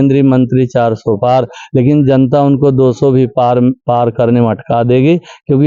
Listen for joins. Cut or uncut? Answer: uncut